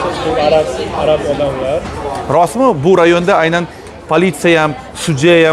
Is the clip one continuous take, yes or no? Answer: yes